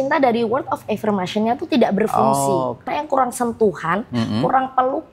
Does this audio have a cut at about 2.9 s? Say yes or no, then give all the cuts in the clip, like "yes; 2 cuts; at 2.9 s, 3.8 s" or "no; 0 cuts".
yes; 1 cut; at 2.9 s